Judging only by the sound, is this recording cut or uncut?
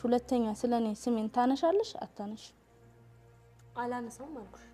uncut